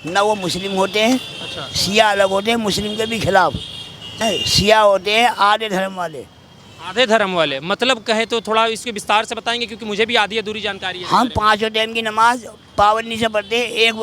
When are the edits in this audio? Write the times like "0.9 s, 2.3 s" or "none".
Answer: 4.1 s